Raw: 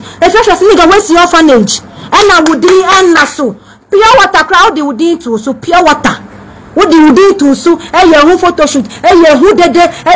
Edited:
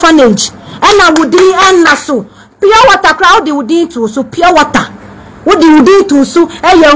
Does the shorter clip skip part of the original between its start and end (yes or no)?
no